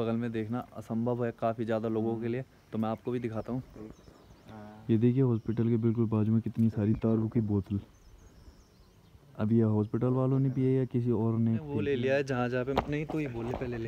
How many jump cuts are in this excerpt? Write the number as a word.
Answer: one